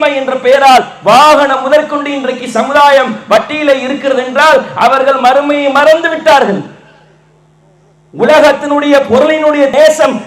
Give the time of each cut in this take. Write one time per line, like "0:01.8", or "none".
none